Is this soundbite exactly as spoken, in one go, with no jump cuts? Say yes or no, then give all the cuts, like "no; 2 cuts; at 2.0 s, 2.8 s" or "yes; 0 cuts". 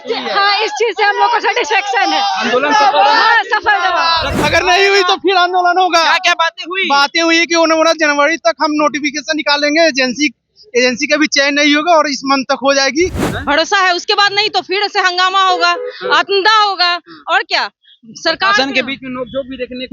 no; 2 cuts; at 4.3 s, 13.2 s